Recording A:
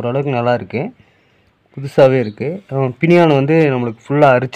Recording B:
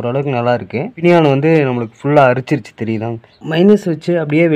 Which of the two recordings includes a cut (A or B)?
B